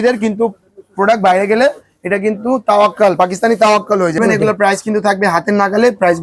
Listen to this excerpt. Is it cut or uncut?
cut